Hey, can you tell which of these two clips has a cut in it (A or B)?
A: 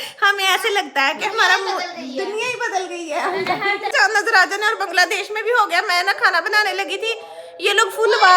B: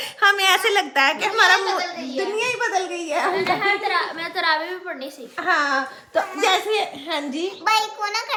A